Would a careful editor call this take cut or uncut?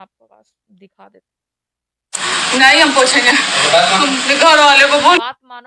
cut